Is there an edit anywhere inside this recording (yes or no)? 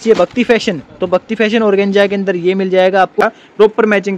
yes